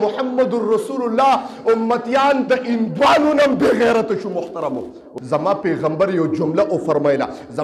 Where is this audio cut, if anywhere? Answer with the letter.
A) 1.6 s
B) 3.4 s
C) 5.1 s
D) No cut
C